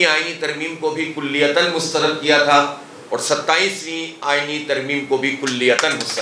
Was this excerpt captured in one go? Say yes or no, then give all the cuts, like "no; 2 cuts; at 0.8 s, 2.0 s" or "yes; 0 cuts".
yes; 0 cuts